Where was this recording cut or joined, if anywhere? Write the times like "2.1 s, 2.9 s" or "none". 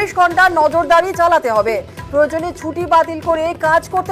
none